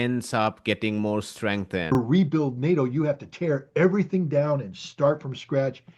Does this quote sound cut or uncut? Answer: cut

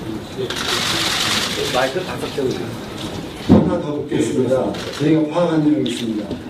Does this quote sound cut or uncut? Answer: uncut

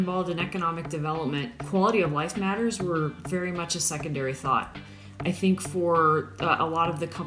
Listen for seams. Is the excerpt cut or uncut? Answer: cut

